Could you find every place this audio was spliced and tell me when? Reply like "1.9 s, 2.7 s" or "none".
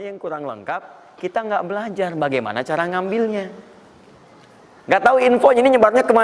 none